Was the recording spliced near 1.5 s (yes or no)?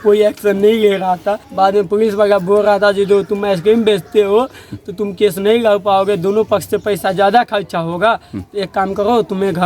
yes